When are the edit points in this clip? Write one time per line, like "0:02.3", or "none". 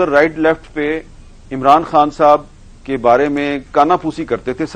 none